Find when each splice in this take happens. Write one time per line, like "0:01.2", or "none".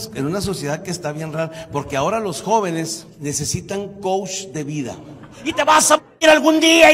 0:03.0
0:05.5